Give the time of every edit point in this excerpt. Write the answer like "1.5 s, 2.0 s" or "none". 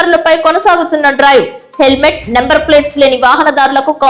none